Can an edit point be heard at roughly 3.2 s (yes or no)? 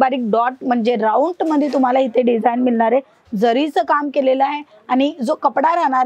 no